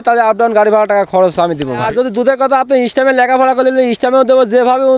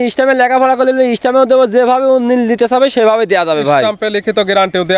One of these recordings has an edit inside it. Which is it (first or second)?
first